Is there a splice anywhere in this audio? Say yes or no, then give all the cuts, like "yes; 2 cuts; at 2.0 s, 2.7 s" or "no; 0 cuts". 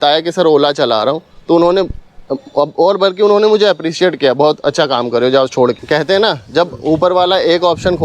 yes; 1 cut; at 5.8 s